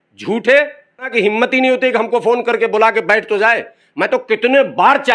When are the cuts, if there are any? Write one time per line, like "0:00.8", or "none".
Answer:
0:01.1